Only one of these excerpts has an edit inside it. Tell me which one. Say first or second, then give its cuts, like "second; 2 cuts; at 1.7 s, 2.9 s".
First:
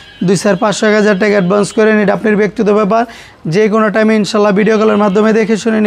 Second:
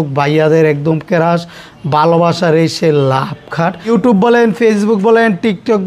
second; 1 cut; at 3.9 s